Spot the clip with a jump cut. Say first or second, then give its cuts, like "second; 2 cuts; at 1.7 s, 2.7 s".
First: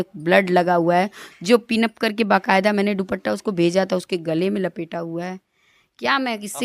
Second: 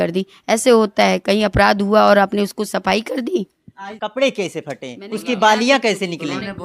second; 1 cut; at 3.9 s